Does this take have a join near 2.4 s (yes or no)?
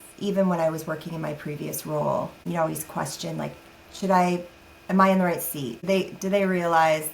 yes